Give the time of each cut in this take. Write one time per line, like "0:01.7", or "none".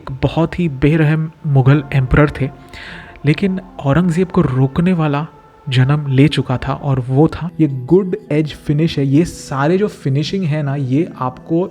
0:07.4